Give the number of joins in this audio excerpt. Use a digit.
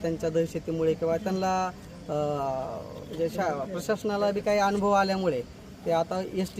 0